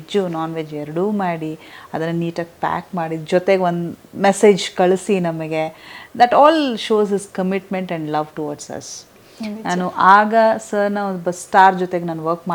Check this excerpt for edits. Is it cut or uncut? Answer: uncut